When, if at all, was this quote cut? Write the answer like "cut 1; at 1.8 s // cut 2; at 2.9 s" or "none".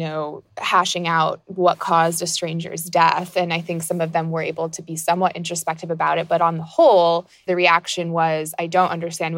cut 1; at 7.5 s